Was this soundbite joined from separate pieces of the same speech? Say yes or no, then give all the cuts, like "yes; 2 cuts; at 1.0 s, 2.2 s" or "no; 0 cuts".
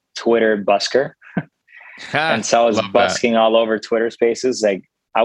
no; 0 cuts